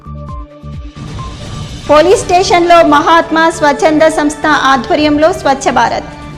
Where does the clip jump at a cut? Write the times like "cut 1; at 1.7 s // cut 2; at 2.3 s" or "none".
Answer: cut 1; at 1.7 s